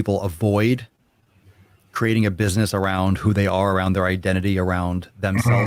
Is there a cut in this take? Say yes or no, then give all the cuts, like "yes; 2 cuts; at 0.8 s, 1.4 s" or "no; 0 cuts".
no; 0 cuts